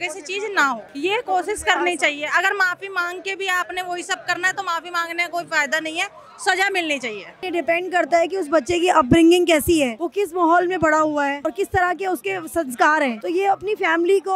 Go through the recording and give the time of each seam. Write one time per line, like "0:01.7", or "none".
0:00.9
0:07.4
0:10.0
0:11.4
0:13.2